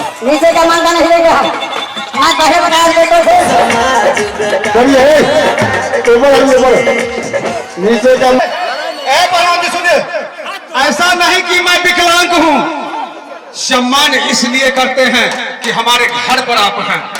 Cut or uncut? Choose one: cut